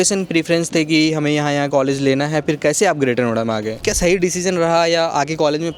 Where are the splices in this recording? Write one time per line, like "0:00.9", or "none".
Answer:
0:03.8